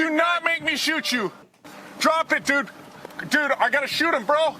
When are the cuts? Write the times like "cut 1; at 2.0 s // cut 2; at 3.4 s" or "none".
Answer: cut 1; at 1.5 s